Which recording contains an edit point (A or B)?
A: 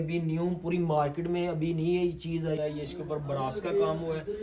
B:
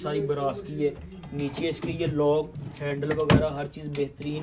A